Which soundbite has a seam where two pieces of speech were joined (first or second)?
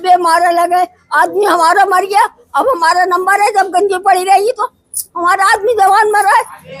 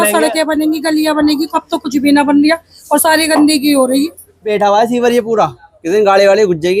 second